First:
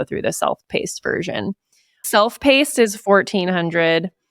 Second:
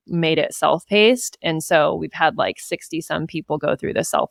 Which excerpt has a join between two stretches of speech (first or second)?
first